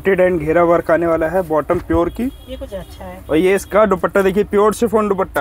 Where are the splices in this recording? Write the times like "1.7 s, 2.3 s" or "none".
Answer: none